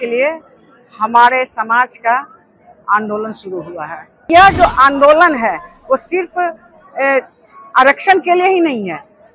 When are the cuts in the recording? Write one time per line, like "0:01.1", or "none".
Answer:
0:04.3